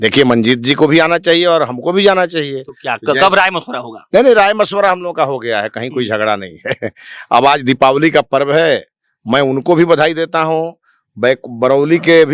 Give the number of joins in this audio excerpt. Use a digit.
0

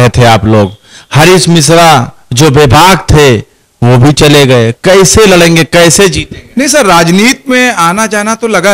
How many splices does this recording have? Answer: 0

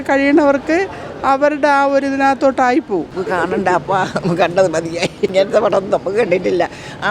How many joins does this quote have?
2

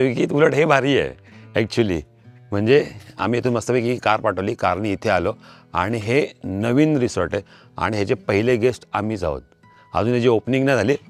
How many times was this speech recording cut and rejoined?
0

